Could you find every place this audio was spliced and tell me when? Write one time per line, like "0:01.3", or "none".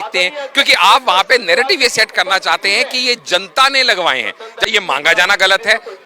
0:04.7